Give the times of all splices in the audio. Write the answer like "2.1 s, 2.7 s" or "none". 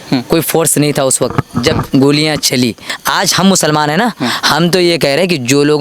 2.8 s